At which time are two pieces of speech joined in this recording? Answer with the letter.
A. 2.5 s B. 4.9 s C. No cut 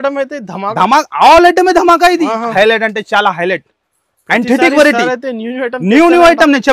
A